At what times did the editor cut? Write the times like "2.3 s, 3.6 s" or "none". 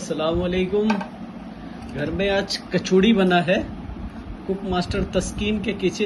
none